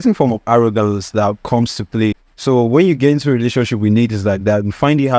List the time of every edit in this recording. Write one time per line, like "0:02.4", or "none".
0:02.3